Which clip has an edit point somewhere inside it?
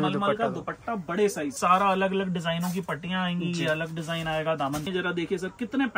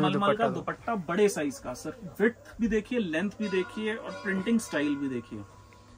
first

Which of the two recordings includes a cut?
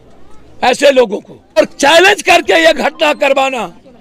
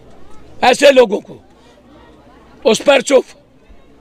first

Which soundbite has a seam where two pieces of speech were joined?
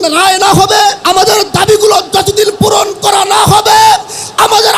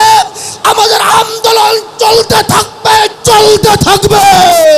first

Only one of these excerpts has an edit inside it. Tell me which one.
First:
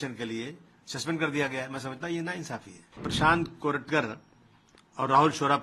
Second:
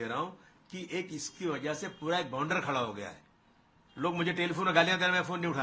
first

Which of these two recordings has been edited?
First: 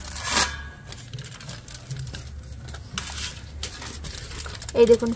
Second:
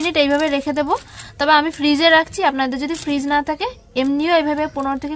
first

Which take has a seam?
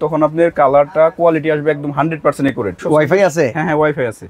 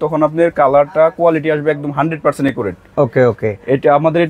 first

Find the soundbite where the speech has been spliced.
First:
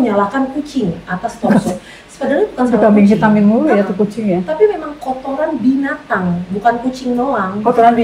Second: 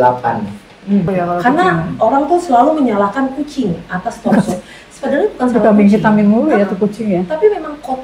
second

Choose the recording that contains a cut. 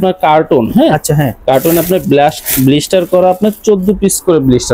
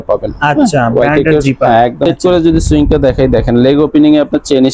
second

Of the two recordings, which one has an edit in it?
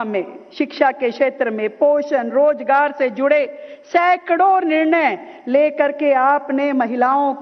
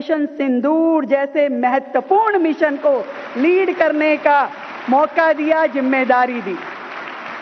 second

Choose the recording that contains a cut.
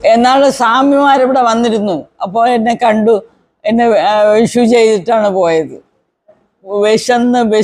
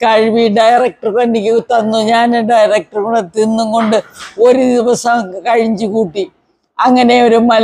first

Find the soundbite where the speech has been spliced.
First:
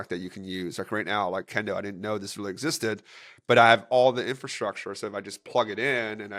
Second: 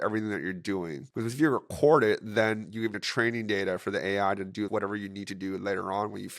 second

